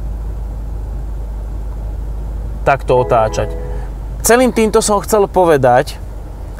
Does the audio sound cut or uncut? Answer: cut